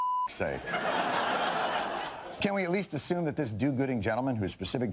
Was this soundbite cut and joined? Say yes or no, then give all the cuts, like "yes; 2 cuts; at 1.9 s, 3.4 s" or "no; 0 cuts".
no; 0 cuts